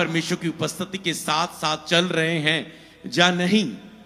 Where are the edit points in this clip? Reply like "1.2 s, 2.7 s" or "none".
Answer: none